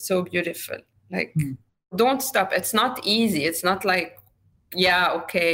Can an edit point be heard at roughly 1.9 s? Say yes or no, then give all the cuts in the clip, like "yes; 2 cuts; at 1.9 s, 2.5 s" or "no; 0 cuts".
yes; 1 cut; at 1.9 s